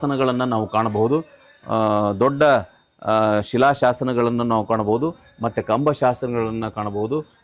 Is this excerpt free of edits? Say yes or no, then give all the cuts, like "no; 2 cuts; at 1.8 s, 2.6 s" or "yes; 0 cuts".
yes; 0 cuts